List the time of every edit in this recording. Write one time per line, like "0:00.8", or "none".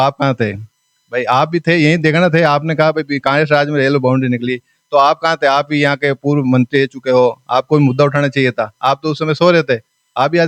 none